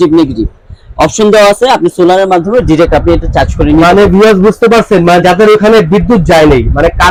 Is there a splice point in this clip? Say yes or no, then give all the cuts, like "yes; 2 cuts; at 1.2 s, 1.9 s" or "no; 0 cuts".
no; 0 cuts